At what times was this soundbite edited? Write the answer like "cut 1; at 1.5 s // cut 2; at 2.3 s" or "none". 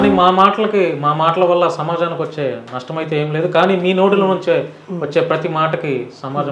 none